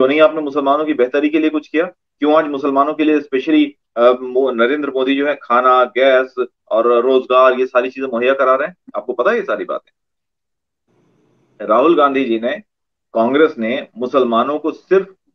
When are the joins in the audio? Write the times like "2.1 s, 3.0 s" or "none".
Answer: none